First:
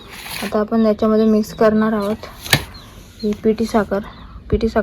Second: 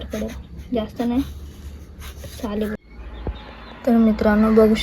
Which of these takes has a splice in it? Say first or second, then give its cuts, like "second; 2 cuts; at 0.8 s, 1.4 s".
second; 1 cut; at 2.8 s